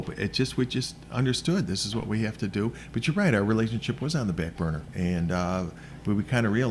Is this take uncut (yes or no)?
no